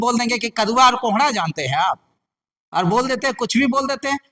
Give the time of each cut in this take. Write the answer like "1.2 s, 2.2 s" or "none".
none